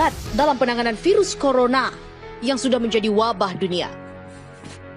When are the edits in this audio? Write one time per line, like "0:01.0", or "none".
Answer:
none